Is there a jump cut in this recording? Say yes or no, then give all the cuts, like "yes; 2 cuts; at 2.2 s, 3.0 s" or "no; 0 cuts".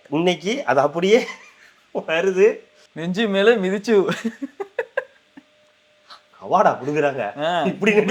no; 0 cuts